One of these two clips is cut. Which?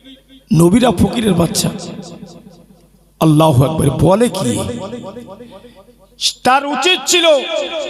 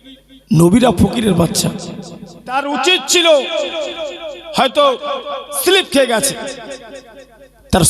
second; 1 cut; at 2.5 s

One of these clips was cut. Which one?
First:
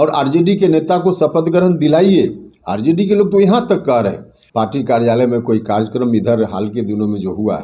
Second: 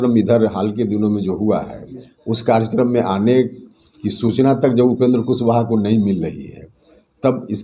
first; 1 cut; at 4.4 s

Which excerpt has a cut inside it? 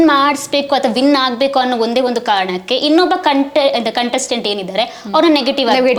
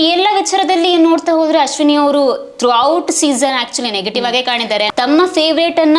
second; 1 cut; at 4.9 s

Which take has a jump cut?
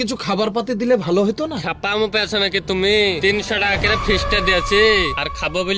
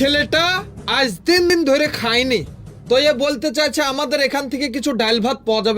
second; 1 cut; at 1.5 s

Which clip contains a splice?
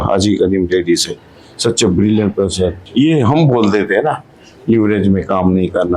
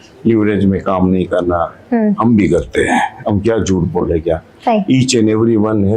first; 1 cut; at 2.8 s

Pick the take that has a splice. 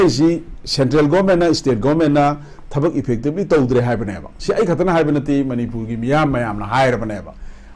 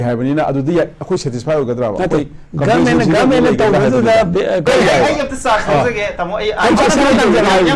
second; 1 cut; at 4.6 s

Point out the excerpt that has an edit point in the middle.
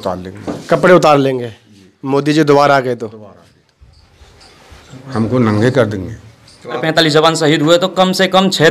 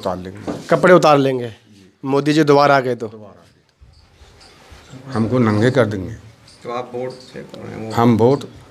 first; 1 cut; at 6.8 s

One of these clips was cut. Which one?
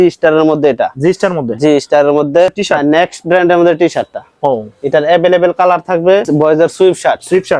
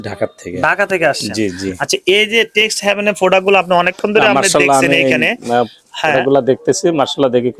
first; 2 cuts; at 2.6 s, 6.3 s

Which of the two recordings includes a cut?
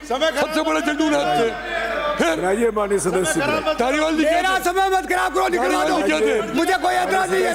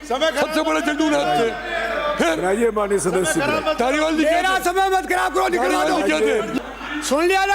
second; 1 cut; at 6.5 s

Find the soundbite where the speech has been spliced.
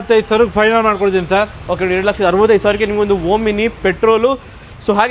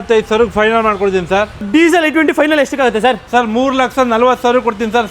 second; 1 cut; at 1.6 s

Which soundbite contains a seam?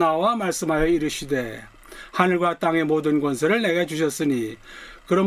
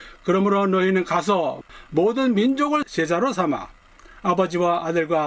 second; 2 cuts; at 1.6 s, 2.8 s

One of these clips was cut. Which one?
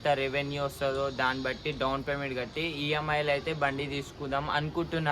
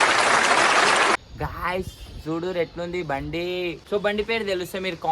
second; 2 cuts; at 1.2 s, 3.8 s

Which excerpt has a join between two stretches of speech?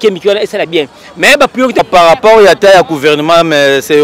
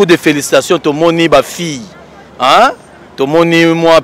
first; 1 cut; at 1.8 s

